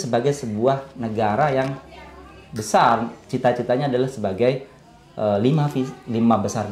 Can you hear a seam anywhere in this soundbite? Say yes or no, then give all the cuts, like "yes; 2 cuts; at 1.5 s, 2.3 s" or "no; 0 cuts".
no; 0 cuts